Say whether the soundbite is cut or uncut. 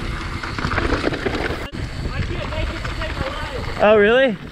cut